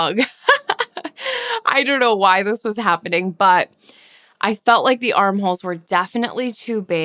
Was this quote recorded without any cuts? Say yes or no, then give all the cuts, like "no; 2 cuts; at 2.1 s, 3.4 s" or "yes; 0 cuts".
yes; 0 cuts